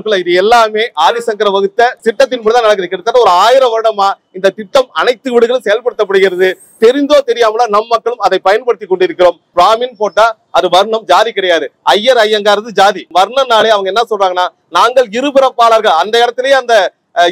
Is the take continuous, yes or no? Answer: no